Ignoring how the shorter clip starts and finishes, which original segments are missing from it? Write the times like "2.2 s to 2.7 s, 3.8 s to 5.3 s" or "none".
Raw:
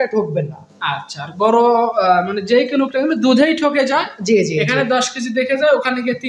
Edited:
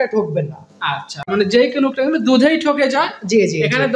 1.3 s to 2.3 s